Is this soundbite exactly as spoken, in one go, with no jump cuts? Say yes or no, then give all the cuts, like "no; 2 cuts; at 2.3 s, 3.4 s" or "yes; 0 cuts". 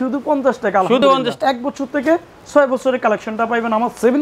no; 1 cut; at 1.0 s